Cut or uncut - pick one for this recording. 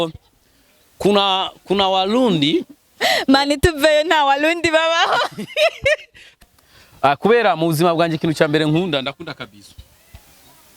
cut